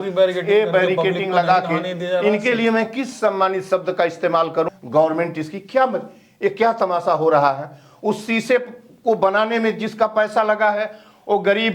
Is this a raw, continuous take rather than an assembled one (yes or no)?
no